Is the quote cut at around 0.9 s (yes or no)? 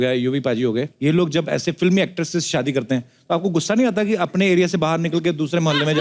yes